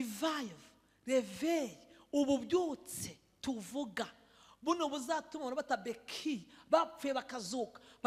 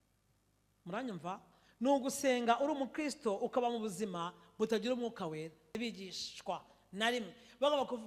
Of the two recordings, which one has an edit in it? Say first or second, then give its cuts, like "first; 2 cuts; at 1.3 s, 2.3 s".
second; 1 cut; at 5.8 s